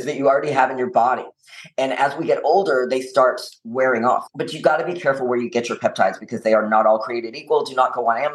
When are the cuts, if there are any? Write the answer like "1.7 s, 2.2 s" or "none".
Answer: 4.3 s